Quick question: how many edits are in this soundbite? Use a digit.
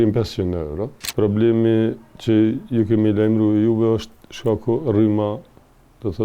1